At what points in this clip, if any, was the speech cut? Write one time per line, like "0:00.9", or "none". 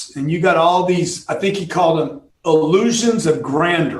0:02.2